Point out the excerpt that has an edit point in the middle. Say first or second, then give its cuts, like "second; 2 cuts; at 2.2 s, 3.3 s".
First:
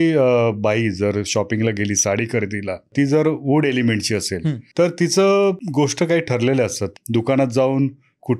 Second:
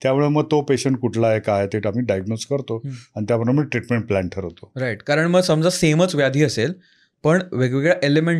first; 4 cuts; at 2.9 s, 4.6 s, 5.6 s, 6.9 s